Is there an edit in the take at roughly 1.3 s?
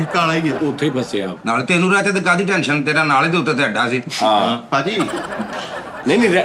yes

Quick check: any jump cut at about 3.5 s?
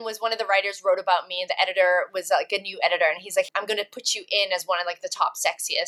yes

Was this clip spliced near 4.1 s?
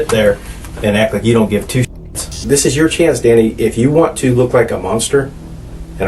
no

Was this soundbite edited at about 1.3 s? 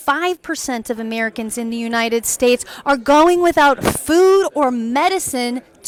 no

